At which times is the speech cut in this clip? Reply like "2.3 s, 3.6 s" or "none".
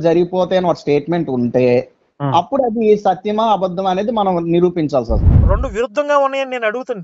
5.2 s